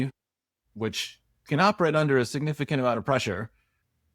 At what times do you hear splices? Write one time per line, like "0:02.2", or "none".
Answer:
none